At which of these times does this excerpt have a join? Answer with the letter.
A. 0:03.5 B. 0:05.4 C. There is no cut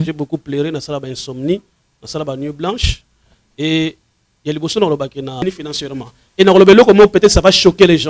B